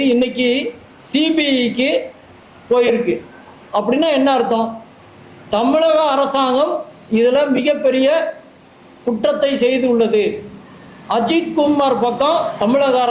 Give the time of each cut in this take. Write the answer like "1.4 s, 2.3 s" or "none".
none